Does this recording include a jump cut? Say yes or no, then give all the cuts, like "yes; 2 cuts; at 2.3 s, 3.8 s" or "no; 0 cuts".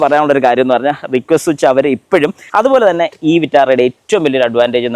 yes; 1 cut; at 2.4 s